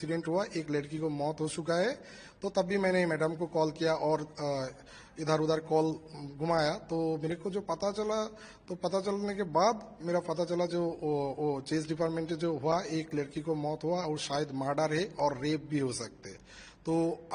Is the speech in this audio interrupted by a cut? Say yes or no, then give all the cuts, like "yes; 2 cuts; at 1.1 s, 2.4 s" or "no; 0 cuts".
no; 0 cuts